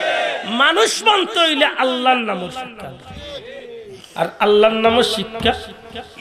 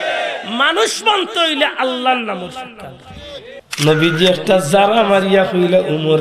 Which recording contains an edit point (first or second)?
second